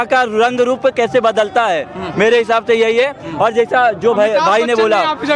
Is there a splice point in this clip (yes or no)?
no